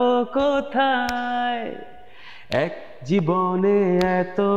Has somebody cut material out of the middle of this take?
no; 0 cuts

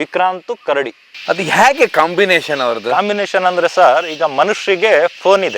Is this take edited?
yes; 1 cut; at 1.1 s

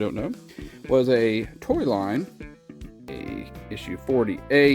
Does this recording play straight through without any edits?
no; 1 cut; at 3.1 s

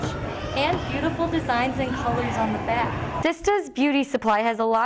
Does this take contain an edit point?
yes; 1 cut; at 3.1 s

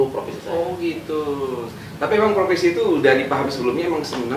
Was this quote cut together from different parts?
no; 0 cuts

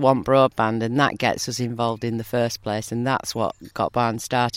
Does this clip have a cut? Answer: no; 0 cuts

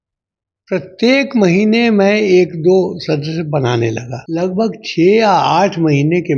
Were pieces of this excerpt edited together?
yes; 1 cut; at 4.1 s

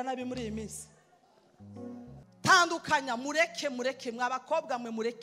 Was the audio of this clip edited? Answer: yes; 1 cut; at 2.3 s

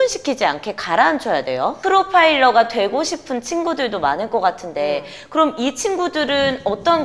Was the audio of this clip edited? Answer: yes; 1 cut; at 1.8 s

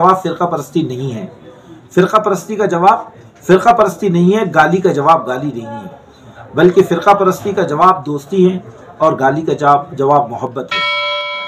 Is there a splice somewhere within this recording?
no; 0 cuts

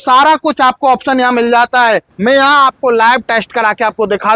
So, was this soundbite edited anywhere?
yes; 1 cut; at 2.1 s

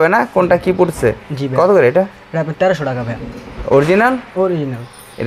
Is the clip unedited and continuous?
yes; 0 cuts

